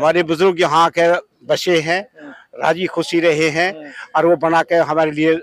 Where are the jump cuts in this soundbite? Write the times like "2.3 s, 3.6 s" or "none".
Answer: none

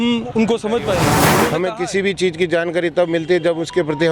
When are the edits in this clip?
1.3 s

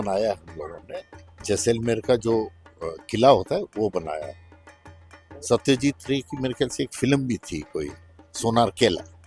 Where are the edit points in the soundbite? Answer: none

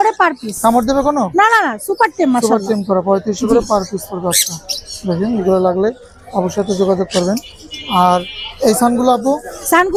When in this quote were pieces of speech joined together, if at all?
none

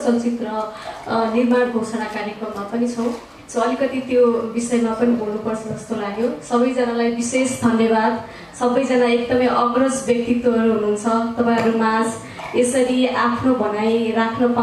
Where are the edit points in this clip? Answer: none

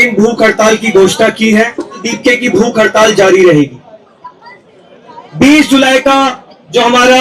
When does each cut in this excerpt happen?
2.1 s

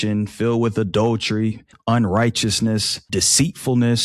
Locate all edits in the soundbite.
1.7 s, 3.0 s

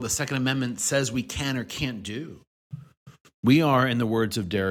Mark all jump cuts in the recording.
none

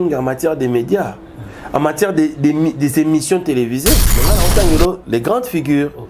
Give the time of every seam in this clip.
4.3 s

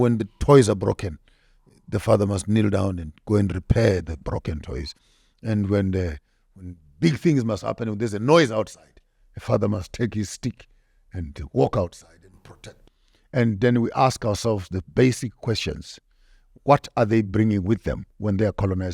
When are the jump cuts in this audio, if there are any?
12.8 s

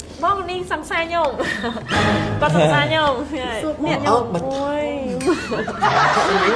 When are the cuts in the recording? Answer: 4.0 s

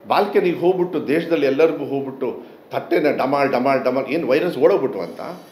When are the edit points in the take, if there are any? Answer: none

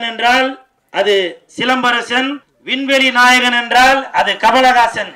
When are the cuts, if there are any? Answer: 2.5 s

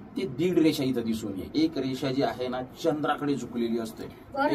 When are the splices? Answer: 1.5 s

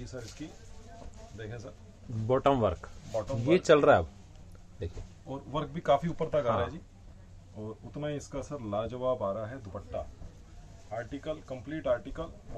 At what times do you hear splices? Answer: none

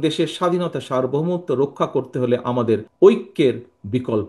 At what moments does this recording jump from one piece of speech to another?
2.9 s

